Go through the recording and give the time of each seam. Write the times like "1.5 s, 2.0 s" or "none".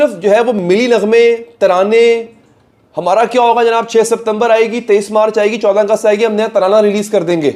none